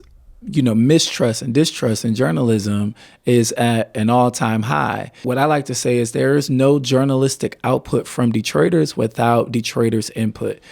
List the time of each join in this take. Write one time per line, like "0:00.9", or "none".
0:05.2